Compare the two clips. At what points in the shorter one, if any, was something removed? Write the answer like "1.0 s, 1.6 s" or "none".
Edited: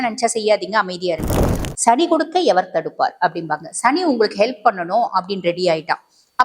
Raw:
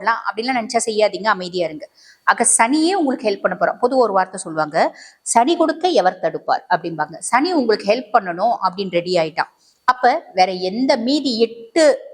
1.6 s